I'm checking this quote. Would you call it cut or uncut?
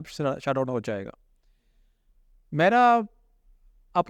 uncut